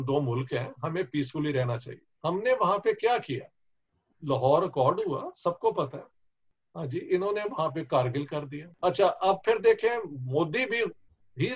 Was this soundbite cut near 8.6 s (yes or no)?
yes